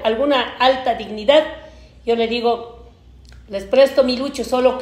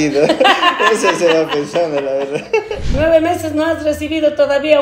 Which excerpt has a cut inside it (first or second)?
second